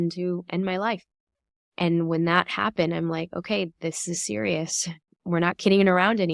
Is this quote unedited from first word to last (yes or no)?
no